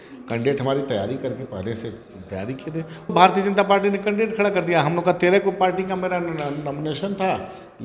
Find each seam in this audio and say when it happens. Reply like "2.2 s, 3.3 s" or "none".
3.1 s